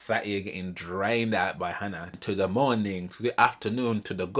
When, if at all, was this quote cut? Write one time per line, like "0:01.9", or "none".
0:02.1